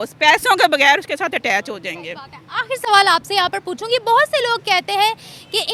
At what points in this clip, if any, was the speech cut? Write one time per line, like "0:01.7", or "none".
none